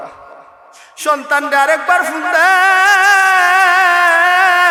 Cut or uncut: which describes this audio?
uncut